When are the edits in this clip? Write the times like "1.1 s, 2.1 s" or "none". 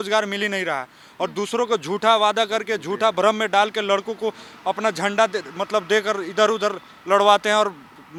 none